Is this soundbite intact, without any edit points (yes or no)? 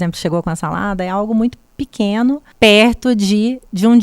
no